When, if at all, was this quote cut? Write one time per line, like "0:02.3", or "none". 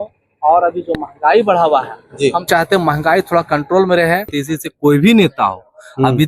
0:04.4